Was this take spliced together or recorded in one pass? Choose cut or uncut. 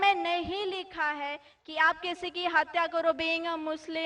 cut